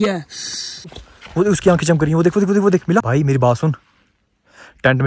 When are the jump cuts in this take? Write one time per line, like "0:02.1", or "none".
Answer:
0:01.0
0:03.1